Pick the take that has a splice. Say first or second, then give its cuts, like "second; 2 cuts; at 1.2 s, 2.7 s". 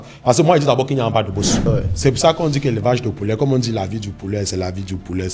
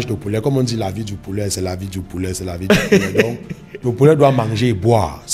first; 1 cut; at 1.7 s